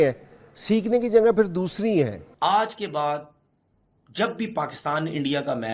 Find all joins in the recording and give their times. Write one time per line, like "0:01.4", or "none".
0:02.2